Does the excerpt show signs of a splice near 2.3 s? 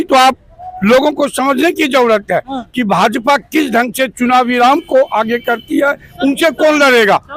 no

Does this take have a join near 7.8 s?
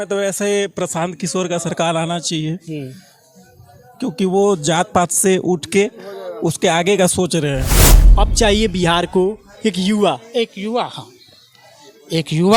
yes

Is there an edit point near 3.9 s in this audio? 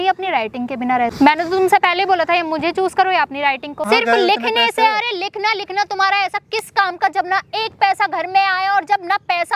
yes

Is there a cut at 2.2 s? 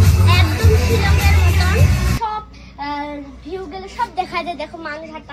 yes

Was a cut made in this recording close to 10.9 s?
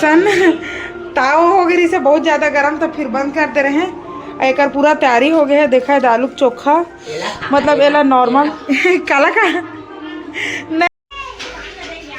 yes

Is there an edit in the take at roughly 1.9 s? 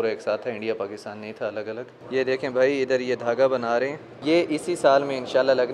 yes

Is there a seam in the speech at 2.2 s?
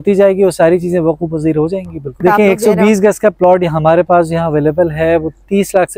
yes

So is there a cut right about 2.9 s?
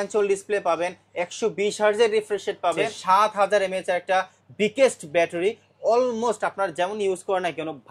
yes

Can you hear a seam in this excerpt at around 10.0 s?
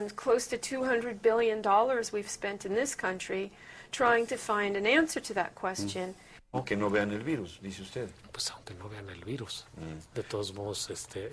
no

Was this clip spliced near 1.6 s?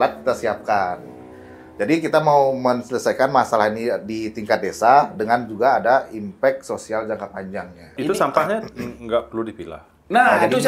no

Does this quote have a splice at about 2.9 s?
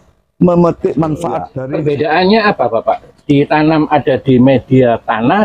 no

